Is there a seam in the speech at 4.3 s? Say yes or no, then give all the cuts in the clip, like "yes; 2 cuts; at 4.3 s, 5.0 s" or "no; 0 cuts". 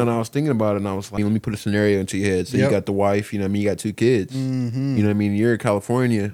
no; 1 cut; at 1.2 s